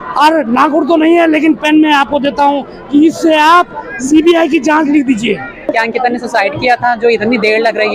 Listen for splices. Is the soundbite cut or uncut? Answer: cut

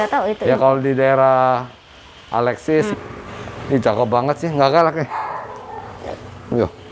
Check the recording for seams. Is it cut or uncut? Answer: cut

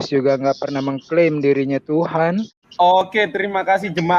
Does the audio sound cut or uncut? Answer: cut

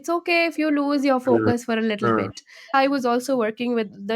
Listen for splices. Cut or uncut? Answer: cut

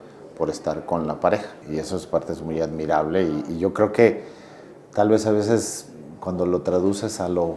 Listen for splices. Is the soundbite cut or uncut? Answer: cut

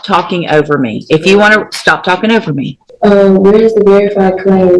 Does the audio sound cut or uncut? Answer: cut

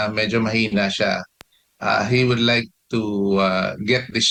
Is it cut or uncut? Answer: uncut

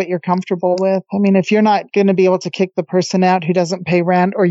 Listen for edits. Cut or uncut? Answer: cut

